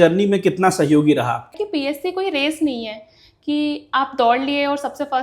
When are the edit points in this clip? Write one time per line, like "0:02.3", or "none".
0:01.5